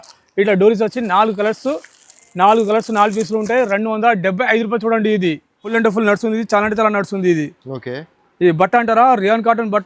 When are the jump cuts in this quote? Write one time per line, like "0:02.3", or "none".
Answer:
0:05.7